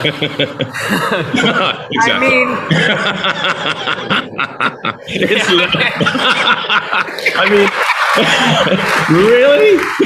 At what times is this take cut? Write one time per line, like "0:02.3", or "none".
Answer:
none